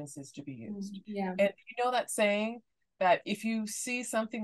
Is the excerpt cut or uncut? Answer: cut